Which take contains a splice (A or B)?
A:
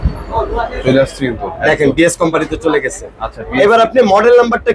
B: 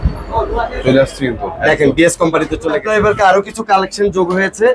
B